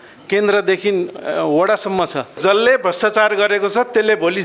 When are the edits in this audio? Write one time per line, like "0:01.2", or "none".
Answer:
0:02.3